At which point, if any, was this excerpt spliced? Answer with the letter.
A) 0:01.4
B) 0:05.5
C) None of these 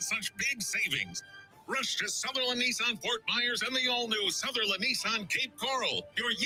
C